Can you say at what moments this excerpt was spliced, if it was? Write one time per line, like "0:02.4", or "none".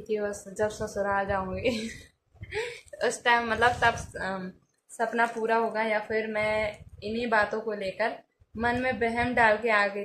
none